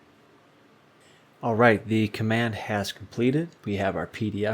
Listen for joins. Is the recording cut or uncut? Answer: cut